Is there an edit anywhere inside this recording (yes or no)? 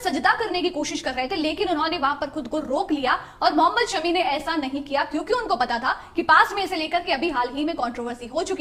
no